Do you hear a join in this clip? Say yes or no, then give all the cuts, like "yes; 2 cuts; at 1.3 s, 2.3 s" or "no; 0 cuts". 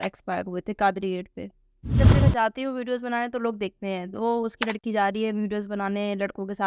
yes; 1 cut; at 2.0 s